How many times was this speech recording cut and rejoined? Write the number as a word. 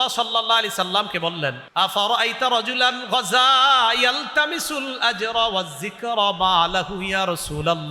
one